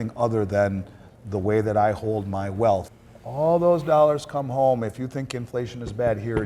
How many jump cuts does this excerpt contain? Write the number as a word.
one